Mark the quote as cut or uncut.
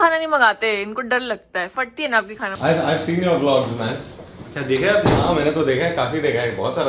cut